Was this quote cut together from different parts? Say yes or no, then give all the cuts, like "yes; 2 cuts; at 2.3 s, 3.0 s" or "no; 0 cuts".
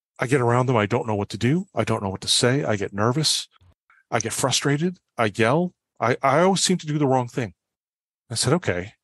yes; 1 cut; at 5.0 s